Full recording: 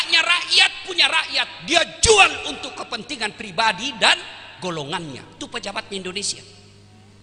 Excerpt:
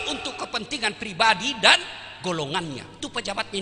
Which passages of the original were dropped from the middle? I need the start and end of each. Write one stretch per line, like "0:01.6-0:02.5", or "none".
none

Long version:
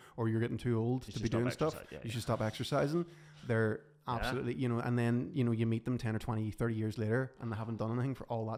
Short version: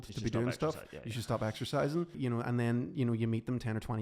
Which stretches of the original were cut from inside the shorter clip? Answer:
0:03.2-0:04.6

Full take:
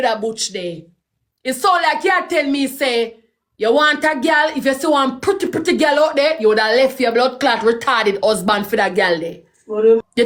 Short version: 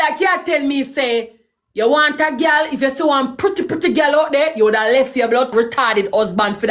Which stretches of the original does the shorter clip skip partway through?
0:07.3-0:07.6

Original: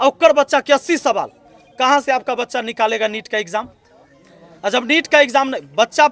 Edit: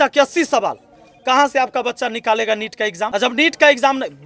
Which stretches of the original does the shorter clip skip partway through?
0:03.6-0:04.6

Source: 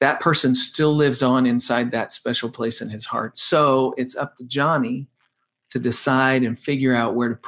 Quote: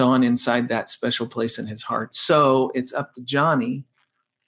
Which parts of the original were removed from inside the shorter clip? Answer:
none

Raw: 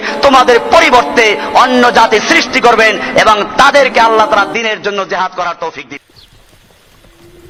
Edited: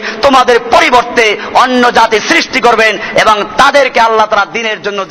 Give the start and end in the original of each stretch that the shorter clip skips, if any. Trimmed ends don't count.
none

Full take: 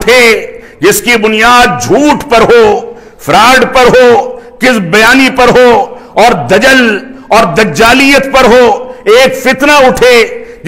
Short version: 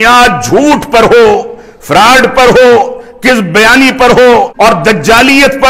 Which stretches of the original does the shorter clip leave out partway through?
0:05.9-0:07.2

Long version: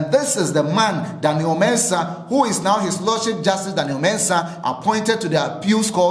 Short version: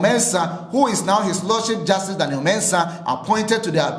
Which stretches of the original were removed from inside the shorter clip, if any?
none

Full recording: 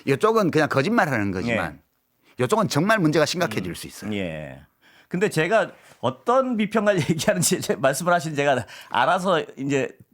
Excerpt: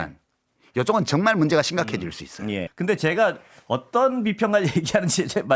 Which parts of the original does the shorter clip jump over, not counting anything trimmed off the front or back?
0:04.3-0:05.0

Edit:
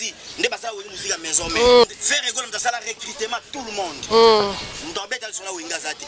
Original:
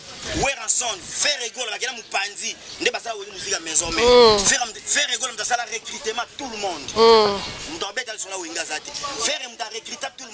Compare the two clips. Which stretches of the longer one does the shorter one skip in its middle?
0:04.3-0:04.7

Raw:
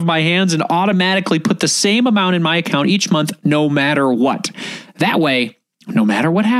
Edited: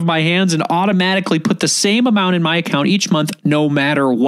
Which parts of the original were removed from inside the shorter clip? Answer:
none

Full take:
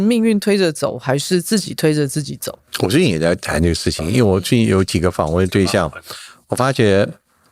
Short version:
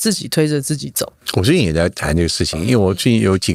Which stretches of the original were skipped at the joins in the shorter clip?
none

